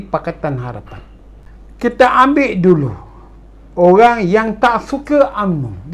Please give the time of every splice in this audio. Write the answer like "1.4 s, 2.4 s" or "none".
0.9 s